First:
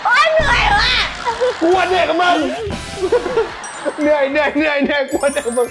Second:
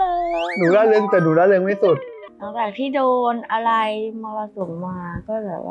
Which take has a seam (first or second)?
second